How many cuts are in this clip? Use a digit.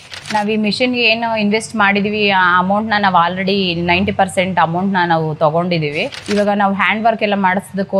1